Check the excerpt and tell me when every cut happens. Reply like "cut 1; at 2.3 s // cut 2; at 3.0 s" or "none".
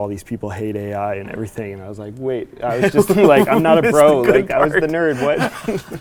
none

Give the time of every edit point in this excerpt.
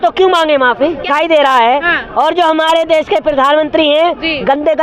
cut 1; at 1.1 s

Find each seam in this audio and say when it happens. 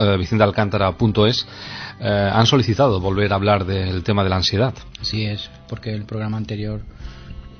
cut 1; at 6.2 s

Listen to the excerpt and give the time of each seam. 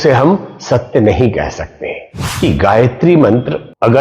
cut 1; at 2.2 s

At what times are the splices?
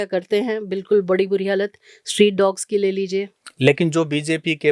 none

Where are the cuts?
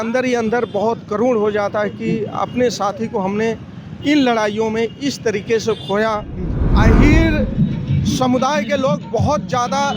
cut 1; at 6.7 s

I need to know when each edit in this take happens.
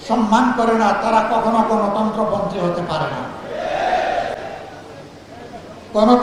none

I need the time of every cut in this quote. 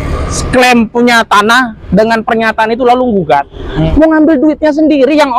cut 1; at 3.8 s

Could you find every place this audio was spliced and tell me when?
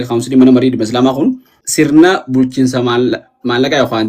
cut 1; at 1.6 s

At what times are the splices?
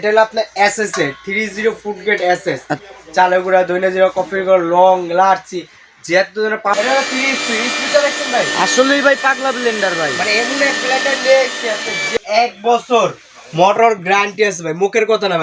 cut 1; at 2.8 s // cut 2; at 6.7 s // cut 3; at 12.2 s

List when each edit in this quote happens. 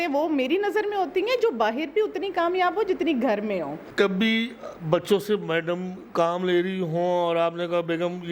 none

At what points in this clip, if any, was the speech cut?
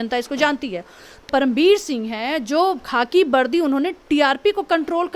cut 1; at 1.3 s

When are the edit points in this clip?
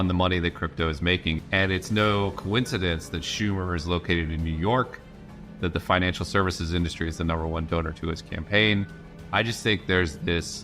cut 1; at 1.4 s

